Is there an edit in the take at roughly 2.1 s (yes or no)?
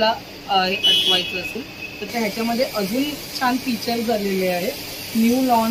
yes